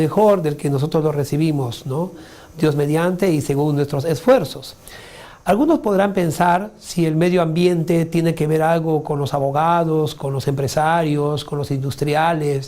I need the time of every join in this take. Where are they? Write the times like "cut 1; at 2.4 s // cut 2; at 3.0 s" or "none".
cut 1; at 11.2 s